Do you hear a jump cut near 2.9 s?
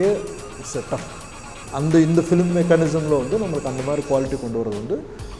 no; 0 cuts

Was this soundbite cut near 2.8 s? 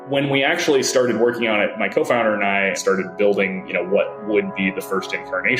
yes; 1 cut; at 2.8 s

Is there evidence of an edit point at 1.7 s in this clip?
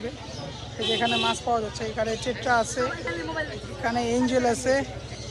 no; 0 cuts

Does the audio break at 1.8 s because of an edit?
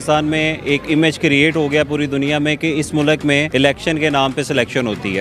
no; 1 cut; at 3.5 s

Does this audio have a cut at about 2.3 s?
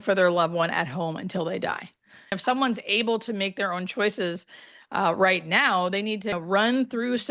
yes; 2 cuts; at 2.3 s, 6.4 s

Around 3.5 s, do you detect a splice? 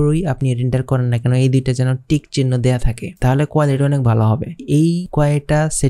no; 1 cut; at 4.9 s

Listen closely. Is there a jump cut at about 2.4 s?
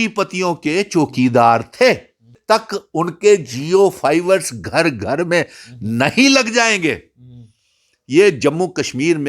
yes; 1 cut; at 2.4 s

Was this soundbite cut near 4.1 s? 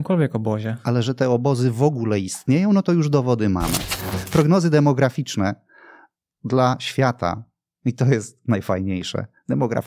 yes; 1 cut; at 4.1 s

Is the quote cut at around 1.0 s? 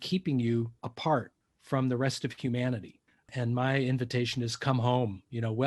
yes; 2 cuts; at 1.0 s, 3.3 s

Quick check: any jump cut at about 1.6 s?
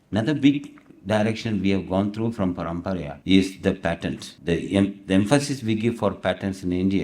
no; 2 cuts; at 3.1 s, 4.3 s

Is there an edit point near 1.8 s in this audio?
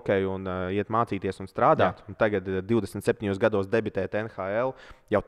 no; 0 cuts

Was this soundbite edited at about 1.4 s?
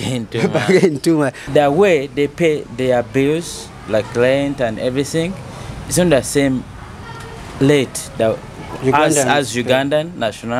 yes; 1 cut; at 1.4 s

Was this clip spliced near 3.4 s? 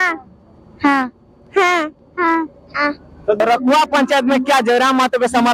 yes; 1 cut; at 3.4 s

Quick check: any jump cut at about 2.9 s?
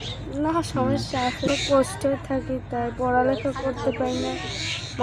no; 1 cut; at 1.5 s

